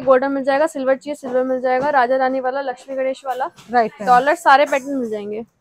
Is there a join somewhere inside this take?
no; 0 cuts

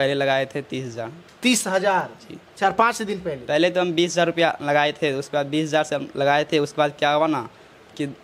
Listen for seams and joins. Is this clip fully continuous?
yes; 0 cuts

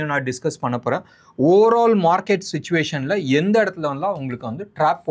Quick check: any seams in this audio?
no; 0 cuts

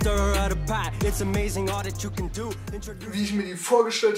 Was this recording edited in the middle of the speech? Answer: yes; 1 cut; at 2.9 s

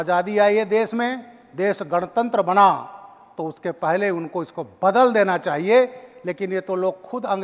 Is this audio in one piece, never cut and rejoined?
yes; 0 cuts

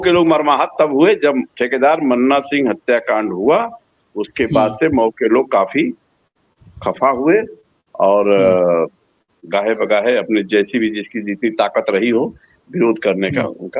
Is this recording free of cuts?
yes; 0 cuts

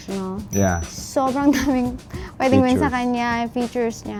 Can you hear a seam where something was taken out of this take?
no; 0 cuts

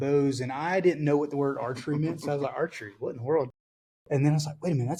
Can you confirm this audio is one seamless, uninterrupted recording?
yes; 0 cuts

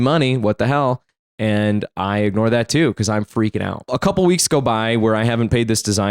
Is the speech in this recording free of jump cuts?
no; 1 cut; at 3.9 s

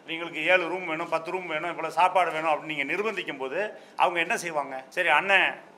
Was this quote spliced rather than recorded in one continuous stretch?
yes; 1 cut; at 4.8 s

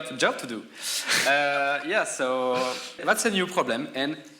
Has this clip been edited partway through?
yes; 1 cut; at 3.0 s

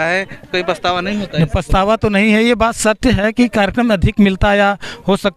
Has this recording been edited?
no; 0 cuts

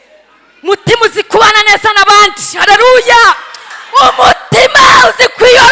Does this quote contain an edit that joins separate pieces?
no; 0 cuts

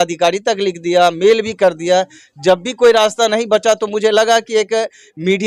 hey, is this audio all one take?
yes; 0 cuts

